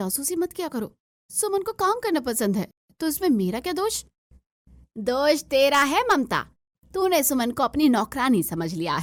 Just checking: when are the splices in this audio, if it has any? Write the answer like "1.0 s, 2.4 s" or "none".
none